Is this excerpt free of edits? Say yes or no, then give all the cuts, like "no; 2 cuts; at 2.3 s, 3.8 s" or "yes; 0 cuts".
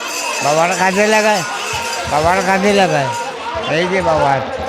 yes; 0 cuts